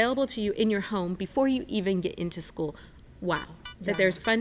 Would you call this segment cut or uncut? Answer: cut